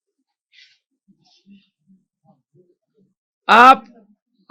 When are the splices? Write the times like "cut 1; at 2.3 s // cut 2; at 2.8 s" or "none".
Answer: none